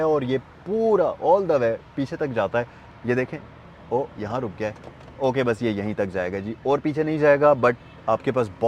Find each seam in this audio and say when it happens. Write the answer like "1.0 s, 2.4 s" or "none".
none